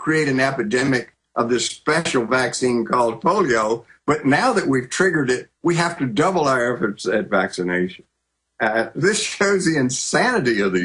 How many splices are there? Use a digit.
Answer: 1